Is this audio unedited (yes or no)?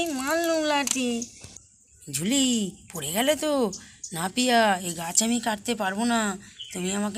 yes